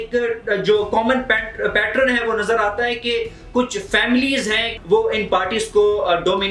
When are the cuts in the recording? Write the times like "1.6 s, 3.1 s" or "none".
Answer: 4.7 s